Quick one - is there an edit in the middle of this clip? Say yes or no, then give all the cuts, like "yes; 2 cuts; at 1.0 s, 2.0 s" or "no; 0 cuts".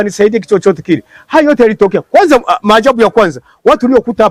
no; 0 cuts